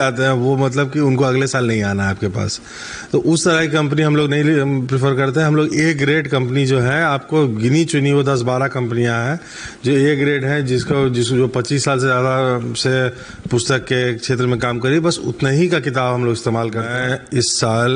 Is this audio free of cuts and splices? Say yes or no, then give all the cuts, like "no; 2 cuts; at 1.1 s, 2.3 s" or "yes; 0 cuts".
no; 1 cut; at 16.9 s